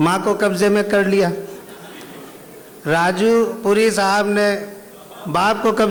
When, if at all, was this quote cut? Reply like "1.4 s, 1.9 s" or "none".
none